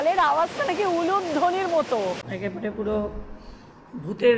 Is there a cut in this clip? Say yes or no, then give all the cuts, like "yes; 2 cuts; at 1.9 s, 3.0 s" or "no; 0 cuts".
yes; 1 cut; at 2.2 s